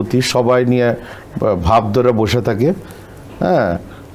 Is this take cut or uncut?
uncut